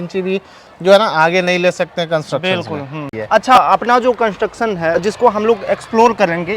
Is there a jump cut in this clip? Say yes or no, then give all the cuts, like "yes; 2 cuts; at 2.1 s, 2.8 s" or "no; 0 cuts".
yes; 1 cut; at 3.1 s